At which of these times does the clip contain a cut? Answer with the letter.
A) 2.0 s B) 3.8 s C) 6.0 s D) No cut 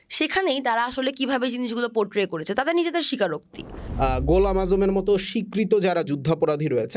B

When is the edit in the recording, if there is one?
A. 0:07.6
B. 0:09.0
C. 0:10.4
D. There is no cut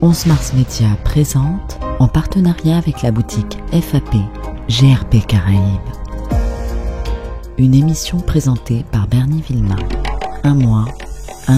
C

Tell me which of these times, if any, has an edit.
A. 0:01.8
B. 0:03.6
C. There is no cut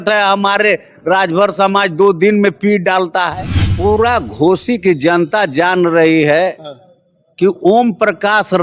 B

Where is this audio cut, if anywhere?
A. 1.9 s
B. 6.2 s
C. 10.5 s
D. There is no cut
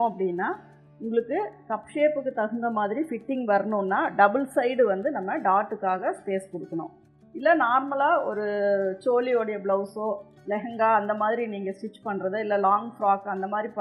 D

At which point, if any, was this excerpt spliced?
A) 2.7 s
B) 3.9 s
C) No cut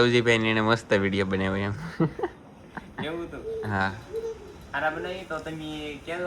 C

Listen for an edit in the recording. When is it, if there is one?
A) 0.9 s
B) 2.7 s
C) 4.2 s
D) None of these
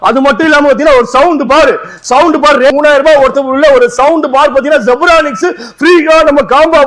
B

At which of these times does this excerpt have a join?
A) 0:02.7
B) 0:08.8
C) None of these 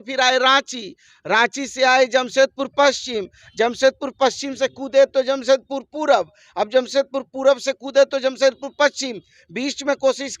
C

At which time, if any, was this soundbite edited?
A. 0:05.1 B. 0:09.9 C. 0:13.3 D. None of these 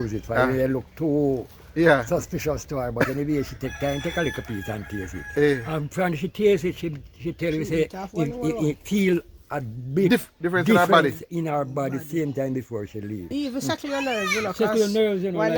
C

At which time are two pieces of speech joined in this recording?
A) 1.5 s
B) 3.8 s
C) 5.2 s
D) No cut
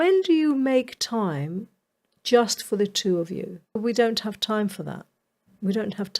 B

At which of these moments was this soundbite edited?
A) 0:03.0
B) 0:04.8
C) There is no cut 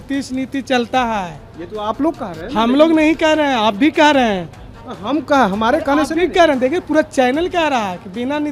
C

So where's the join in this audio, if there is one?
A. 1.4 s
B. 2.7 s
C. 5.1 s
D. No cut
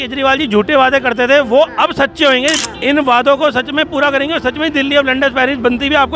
B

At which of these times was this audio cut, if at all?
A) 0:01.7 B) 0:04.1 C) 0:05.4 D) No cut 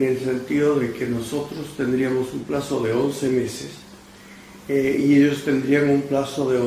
D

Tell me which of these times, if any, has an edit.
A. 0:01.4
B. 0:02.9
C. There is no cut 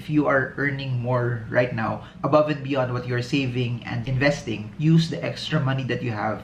C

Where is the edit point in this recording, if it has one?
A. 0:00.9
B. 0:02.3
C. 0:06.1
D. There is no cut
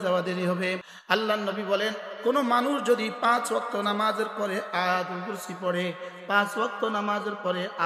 A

